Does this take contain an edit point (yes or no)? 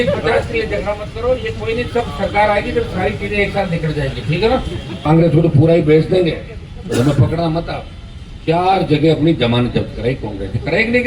yes